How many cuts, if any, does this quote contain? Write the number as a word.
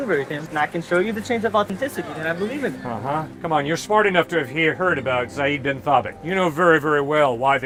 zero